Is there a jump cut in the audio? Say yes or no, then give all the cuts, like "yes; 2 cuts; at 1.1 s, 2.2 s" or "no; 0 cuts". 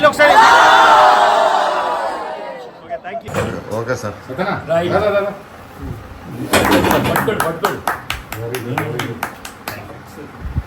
yes; 1 cut; at 3.3 s